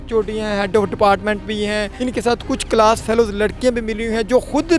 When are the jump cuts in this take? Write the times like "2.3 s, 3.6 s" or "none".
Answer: 1.9 s